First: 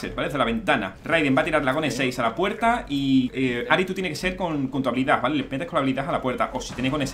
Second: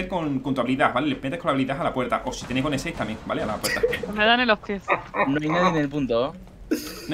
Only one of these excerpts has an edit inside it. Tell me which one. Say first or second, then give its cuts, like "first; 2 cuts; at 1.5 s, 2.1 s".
first; 2 cuts; at 1.0 s, 3.3 s